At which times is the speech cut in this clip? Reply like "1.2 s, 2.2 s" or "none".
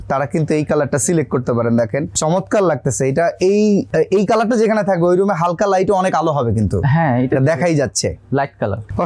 none